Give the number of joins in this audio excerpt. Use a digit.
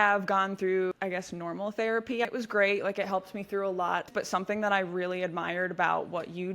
3